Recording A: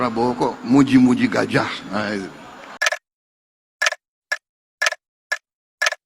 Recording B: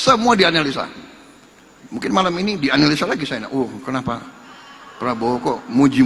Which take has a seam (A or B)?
A